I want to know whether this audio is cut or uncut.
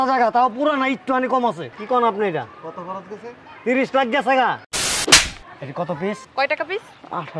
cut